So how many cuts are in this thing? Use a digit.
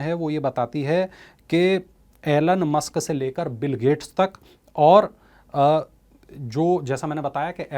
0